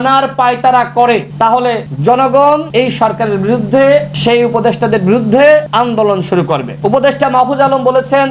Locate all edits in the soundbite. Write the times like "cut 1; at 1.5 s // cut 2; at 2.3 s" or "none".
cut 1; at 1.4 s // cut 2; at 2.7 s // cut 3; at 4.1 s // cut 4; at 5.7 s // cut 5; at 6.7 s